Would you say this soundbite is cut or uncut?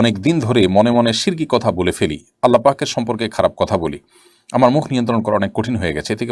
uncut